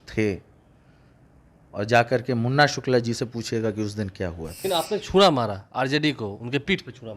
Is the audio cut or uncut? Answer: cut